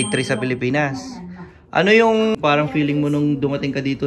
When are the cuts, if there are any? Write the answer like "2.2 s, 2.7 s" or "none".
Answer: 2.4 s